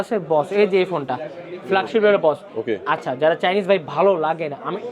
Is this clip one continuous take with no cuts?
yes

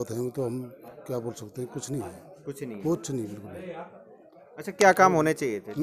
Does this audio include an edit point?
no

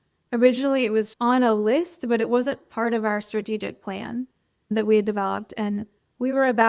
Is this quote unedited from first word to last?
no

